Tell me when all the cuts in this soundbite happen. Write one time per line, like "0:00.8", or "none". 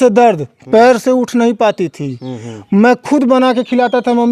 none